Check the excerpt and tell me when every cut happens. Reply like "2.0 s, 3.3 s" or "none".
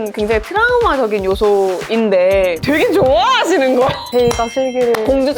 2.6 s, 4.0 s